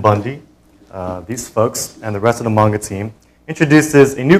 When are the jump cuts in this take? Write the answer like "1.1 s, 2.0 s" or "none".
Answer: 1.0 s